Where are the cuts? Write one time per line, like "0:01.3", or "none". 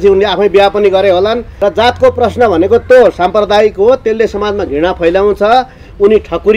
0:01.5